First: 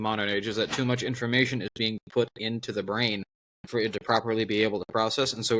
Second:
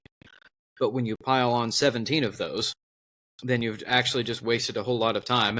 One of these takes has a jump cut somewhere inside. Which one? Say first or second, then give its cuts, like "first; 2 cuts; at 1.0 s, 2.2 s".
second; 1 cut; at 3.4 s